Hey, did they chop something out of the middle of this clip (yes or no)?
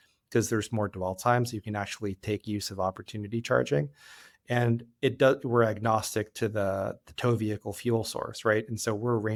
no